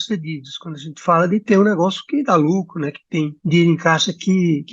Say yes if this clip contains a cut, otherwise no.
yes